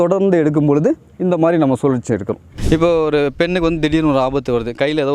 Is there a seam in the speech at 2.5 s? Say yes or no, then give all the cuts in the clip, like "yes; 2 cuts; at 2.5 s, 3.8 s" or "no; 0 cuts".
yes; 1 cut; at 2.5 s